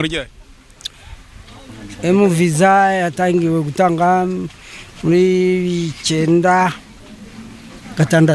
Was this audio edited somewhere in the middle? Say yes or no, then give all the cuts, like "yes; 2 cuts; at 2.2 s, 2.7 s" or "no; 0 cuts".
no; 0 cuts